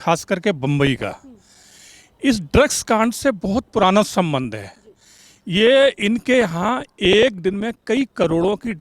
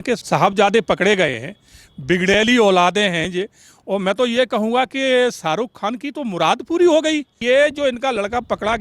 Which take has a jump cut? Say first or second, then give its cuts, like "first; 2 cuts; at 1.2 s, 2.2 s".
second; 1 cut; at 7.3 s